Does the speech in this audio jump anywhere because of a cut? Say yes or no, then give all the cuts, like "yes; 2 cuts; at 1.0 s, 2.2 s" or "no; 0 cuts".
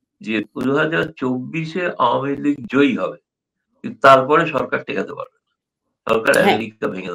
no; 0 cuts